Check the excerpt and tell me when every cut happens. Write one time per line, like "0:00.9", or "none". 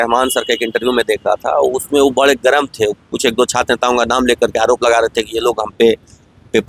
none